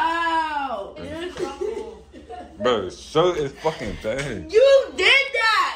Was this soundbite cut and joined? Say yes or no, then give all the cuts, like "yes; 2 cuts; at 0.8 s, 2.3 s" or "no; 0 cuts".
yes; 1 cut; at 0.9 s